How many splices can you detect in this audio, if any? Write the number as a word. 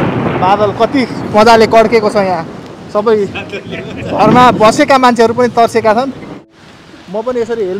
one